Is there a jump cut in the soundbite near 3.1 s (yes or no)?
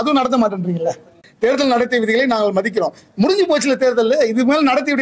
no